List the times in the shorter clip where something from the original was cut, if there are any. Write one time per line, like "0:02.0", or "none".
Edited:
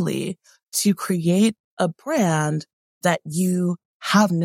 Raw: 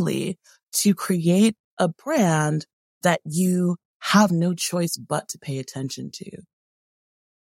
none